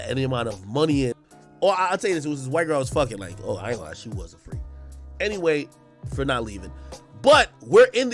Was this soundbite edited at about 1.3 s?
yes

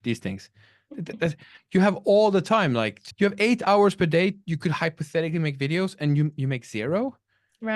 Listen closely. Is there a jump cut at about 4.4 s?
no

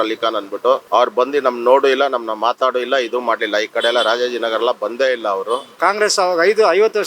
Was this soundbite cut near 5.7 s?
yes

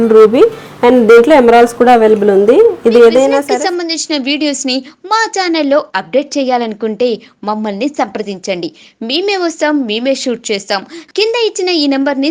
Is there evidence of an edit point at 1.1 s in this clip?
no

